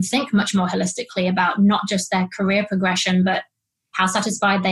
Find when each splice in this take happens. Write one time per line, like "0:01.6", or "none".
none